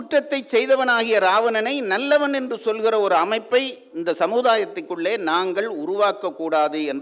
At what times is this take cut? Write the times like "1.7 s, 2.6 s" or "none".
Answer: none